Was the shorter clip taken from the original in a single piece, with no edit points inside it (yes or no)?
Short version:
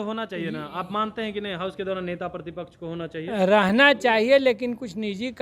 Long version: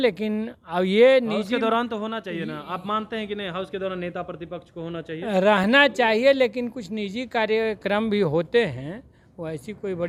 yes